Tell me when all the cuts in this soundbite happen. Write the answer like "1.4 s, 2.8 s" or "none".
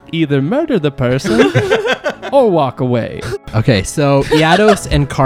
3.4 s